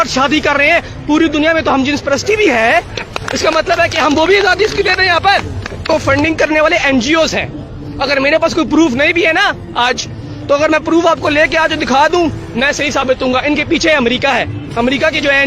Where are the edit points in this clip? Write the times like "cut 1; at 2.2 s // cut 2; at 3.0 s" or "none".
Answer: cut 1; at 5.9 s

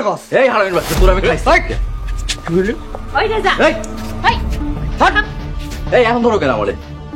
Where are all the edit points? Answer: none

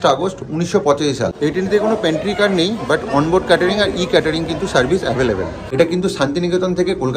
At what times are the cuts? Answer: cut 1; at 1.3 s // cut 2; at 5.6 s

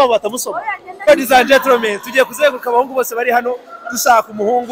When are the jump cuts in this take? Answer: cut 1; at 1.1 s

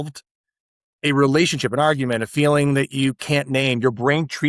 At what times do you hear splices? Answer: none

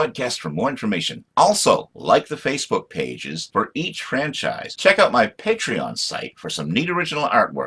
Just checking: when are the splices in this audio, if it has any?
cut 1; at 4.7 s

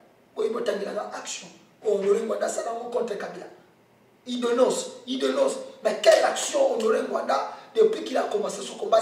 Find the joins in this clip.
none

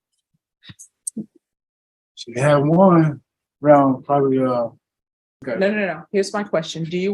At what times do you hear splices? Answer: cut 1; at 5.4 s

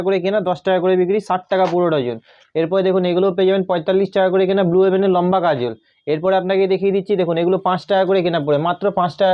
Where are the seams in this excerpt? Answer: none

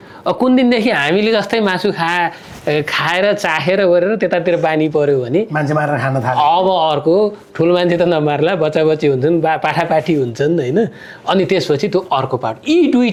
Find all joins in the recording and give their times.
none

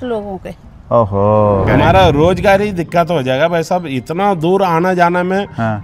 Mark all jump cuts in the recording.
cut 1; at 1.7 s

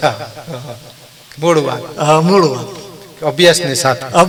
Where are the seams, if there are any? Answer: none

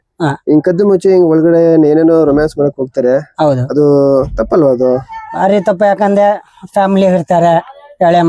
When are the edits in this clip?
none

